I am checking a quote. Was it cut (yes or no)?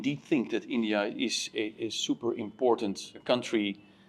yes